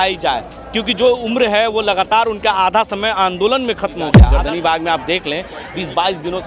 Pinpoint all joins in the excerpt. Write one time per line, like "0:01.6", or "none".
0:04.1